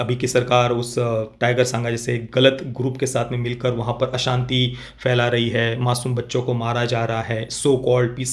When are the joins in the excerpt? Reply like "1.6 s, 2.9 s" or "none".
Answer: none

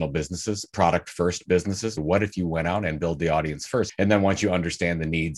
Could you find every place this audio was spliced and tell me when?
2.0 s, 3.9 s

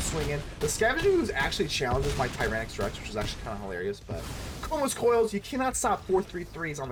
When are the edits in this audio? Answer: none

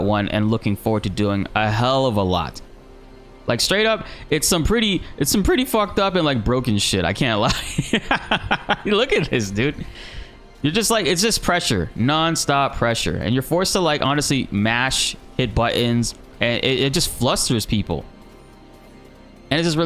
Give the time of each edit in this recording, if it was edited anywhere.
none

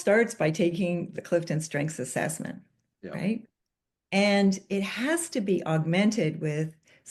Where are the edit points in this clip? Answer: none

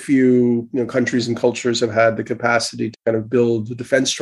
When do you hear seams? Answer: none

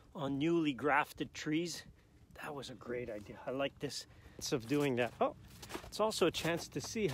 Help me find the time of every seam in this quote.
4.4 s

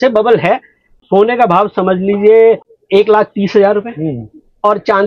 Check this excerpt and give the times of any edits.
0.9 s, 2.7 s

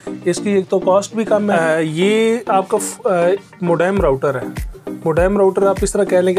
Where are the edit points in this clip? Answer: 1.5 s

